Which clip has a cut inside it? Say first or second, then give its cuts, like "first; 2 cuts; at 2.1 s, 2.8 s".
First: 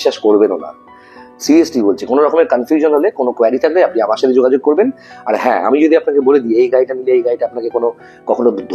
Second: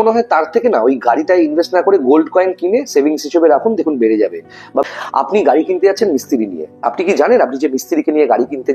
second; 1 cut; at 4.9 s